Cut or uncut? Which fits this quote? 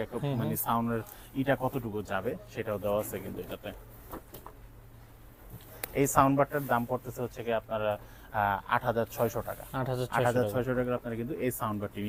uncut